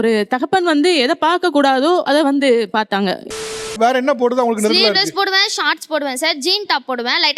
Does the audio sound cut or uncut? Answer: cut